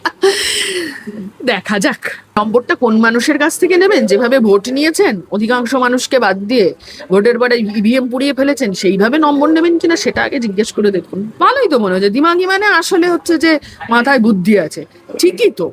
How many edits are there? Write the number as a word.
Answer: two